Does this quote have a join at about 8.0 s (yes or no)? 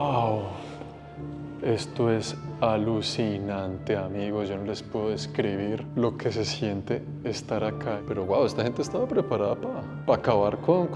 yes